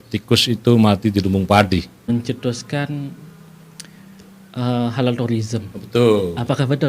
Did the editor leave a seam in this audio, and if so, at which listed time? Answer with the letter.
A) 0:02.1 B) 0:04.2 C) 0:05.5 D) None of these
A